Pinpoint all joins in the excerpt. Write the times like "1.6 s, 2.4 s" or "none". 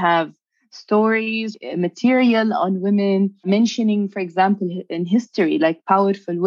1.5 s, 3.5 s